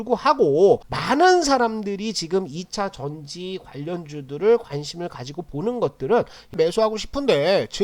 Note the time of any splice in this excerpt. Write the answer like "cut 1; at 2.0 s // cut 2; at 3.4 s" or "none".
cut 1; at 0.9 s // cut 2; at 6.5 s